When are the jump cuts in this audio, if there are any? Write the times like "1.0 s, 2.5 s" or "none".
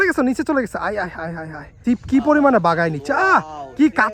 1.8 s

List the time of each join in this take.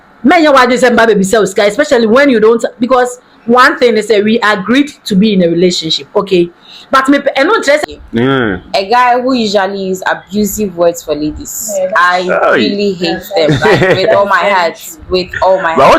7.8 s

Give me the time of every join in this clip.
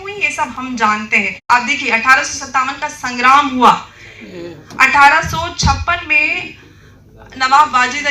1.4 s

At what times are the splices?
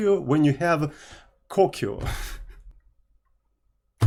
none

